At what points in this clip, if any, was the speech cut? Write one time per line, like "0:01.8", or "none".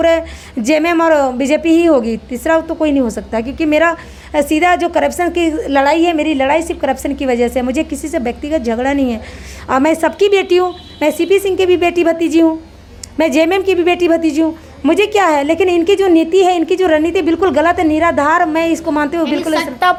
none